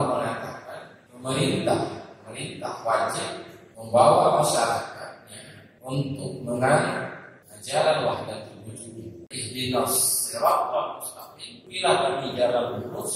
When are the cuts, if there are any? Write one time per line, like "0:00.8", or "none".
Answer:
0:09.3